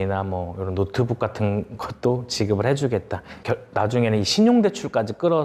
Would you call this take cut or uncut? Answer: cut